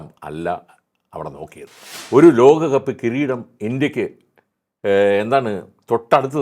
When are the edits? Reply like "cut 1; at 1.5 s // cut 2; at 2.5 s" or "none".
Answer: cut 1; at 1.9 s